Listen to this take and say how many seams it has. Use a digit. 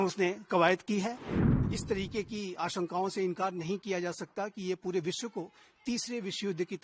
1